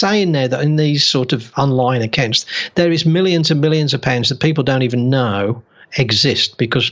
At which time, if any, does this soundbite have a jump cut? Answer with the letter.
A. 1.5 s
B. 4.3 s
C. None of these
A